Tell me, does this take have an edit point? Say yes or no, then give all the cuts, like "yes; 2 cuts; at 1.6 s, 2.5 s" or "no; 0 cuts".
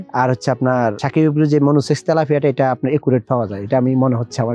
no; 0 cuts